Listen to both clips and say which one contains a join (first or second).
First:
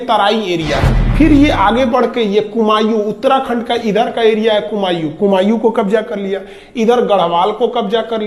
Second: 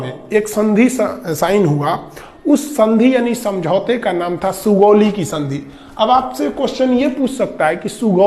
first